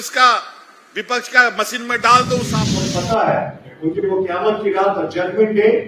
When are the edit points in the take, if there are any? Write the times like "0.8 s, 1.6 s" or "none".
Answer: 2.6 s